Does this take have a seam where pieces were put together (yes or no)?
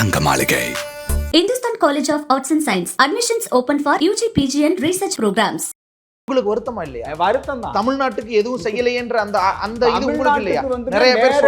yes